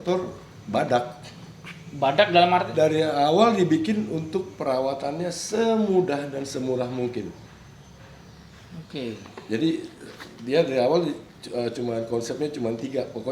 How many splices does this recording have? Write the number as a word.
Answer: zero